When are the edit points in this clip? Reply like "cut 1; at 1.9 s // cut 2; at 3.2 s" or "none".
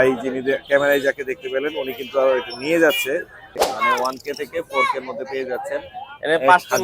cut 1; at 3.6 s